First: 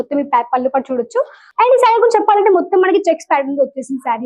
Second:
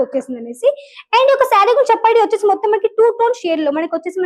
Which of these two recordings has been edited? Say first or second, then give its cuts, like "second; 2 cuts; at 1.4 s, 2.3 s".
first; 1 cut; at 1.4 s